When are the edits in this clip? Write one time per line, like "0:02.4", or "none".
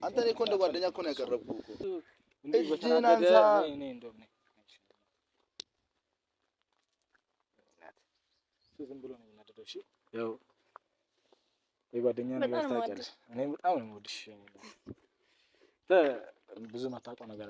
0:01.8